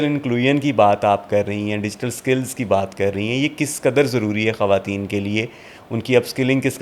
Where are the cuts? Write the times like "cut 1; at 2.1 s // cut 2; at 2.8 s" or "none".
none